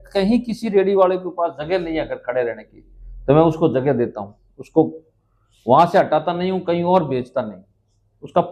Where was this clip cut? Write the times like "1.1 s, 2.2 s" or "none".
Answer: none